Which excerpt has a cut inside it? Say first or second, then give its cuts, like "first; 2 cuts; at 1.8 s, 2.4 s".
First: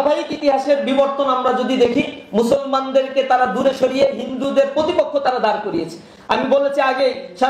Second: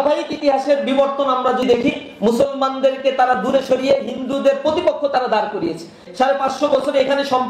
second; 2 cuts; at 1.6 s, 6.0 s